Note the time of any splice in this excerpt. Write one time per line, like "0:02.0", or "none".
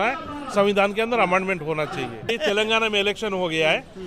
0:02.3

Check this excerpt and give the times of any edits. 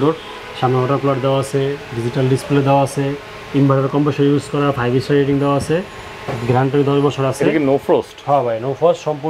none

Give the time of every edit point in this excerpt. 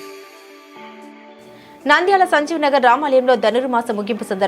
0:01.5

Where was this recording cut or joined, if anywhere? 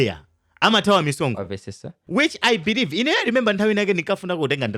0:02.0

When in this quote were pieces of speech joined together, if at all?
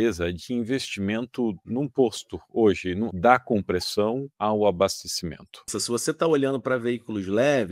0:01.6
0:03.1
0:04.3
0:05.7

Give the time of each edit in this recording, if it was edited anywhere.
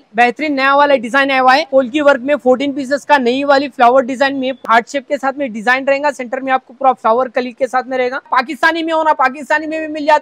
0:01.7
0:04.6
0:08.3

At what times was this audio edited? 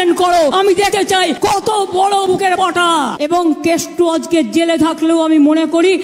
0:03.1

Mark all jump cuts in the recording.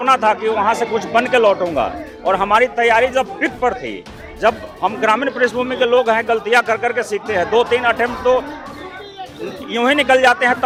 none

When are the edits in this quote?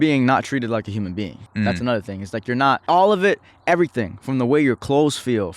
0:01.4
0:02.8

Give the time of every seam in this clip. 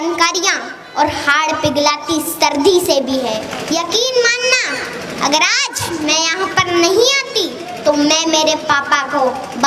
0:03.5

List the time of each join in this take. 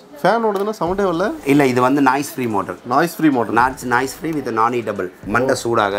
0:01.4

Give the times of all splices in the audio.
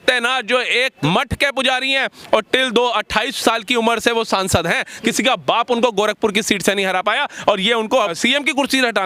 0:00.9
0:08.1

